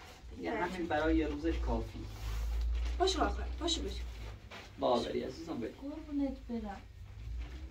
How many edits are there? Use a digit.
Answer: 0